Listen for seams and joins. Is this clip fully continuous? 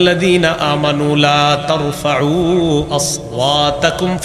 yes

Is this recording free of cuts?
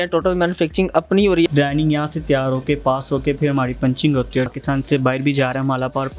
no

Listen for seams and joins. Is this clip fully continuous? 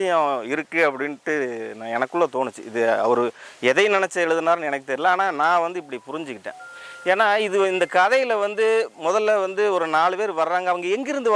yes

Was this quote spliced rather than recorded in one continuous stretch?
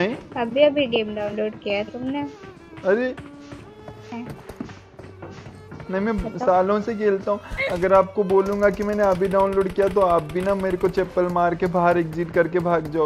no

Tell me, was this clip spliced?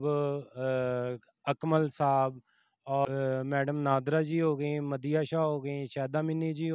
yes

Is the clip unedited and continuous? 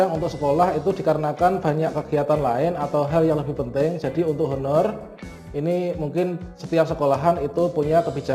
yes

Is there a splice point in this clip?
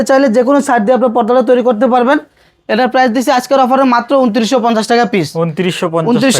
no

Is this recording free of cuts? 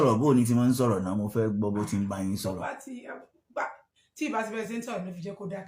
yes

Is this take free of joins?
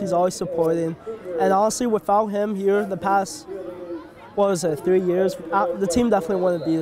yes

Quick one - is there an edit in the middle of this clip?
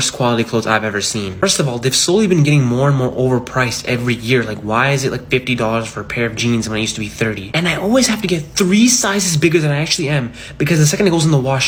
no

